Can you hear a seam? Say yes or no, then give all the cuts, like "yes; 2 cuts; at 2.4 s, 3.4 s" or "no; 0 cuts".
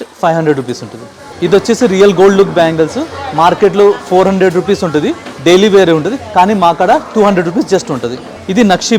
no; 0 cuts